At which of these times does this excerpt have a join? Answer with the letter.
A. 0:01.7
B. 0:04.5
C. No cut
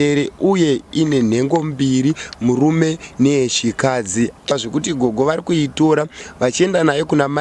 B